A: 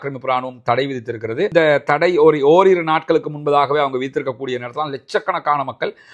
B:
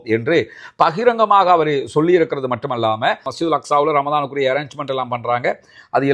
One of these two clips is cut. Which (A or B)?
B